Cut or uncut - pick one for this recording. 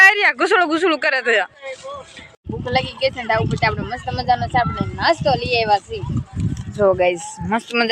cut